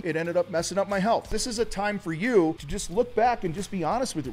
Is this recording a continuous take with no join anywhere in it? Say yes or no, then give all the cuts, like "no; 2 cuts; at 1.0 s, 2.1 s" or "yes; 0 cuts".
no; 1 cut; at 1.3 s